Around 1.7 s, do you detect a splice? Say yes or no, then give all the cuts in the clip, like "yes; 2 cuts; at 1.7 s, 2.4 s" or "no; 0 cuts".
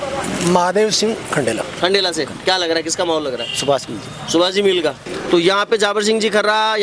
yes; 2 cuts; at 1.7 s, 5.1 s